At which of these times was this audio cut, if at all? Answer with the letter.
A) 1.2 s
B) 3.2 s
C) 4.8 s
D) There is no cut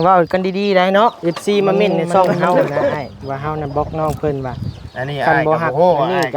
A